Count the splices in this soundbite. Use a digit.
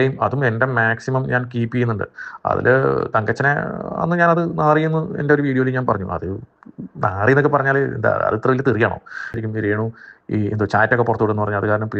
1